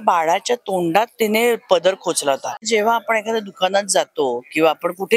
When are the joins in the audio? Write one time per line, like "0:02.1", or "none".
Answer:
0:02.7